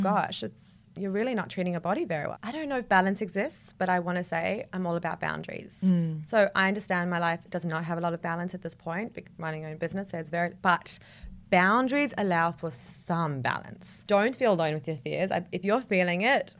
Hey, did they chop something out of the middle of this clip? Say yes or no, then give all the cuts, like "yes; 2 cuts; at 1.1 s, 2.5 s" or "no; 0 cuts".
yes; 2 cuts; at 2.3 s, 13.9 s